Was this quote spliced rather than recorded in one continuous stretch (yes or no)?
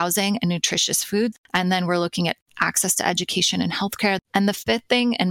yes